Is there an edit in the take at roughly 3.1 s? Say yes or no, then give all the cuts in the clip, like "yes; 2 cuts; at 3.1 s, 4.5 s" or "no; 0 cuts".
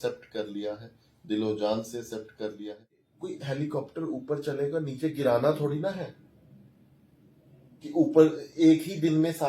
yes; 1 cut; at 3.1 s